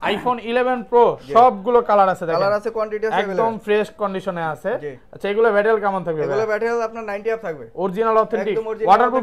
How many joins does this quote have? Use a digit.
0